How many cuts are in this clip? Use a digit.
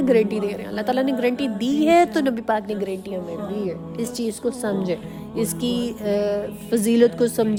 0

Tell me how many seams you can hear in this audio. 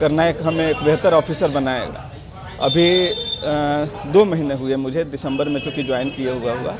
0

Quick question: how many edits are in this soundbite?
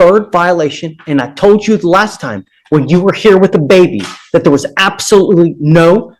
0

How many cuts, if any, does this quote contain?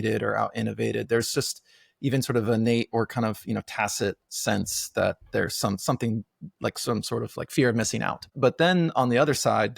1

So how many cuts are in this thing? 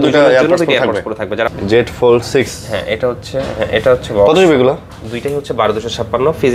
1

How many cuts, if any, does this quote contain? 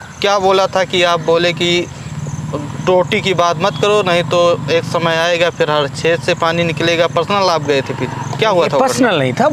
0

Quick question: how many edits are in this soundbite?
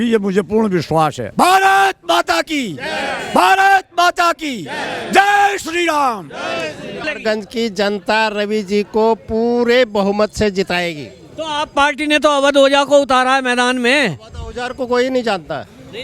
2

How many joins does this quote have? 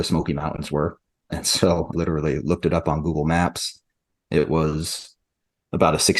1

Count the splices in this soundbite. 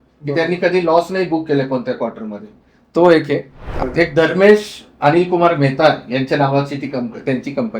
1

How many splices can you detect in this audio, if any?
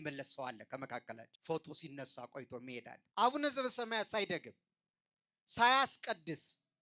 2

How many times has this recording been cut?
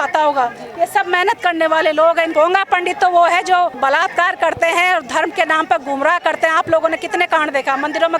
2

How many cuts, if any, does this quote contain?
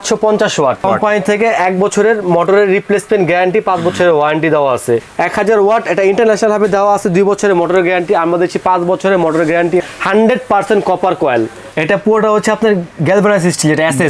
4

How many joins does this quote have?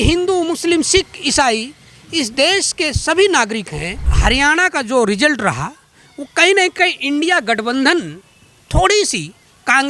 1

